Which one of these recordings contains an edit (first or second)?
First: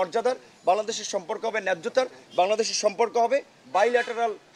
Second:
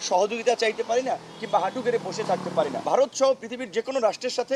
second